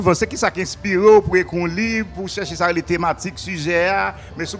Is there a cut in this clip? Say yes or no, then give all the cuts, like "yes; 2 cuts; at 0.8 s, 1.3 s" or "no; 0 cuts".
no; 0 cuts